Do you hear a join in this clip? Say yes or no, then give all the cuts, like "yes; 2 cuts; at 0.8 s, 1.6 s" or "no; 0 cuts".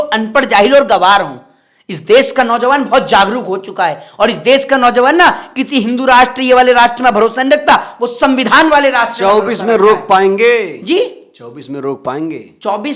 no; 0 cuts